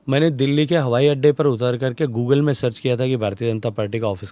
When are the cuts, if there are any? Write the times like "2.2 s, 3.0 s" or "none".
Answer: none